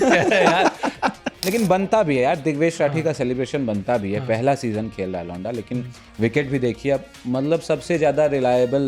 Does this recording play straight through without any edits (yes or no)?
no